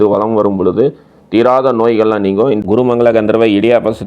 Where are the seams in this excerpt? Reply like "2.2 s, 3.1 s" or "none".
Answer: 2.6 s